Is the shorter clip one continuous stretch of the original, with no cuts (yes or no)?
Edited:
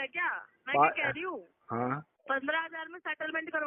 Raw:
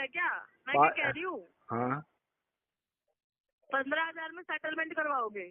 no